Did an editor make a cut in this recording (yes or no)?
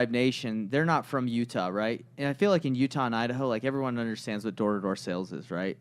no